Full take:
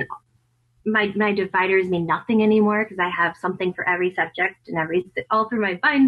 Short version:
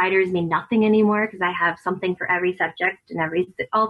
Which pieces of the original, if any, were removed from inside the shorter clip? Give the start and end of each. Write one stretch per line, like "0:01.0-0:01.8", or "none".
none